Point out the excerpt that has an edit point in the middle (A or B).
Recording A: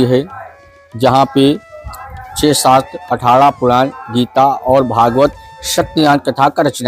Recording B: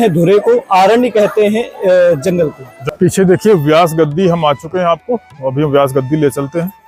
B